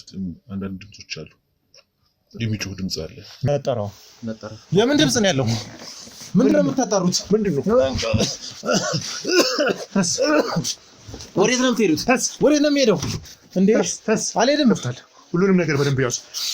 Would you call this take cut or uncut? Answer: uncut